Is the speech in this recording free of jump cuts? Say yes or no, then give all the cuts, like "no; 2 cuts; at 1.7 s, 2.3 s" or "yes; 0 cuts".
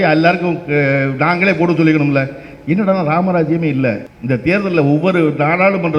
no; 1 cut; at 4.1 s